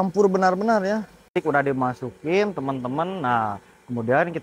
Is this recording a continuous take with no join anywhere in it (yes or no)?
no